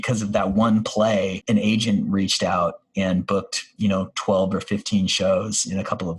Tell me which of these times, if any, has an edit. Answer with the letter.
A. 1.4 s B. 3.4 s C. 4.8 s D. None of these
A